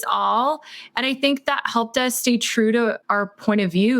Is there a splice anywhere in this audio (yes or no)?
yes